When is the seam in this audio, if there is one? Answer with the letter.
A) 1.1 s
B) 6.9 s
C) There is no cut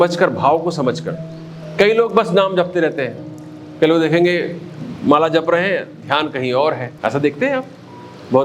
B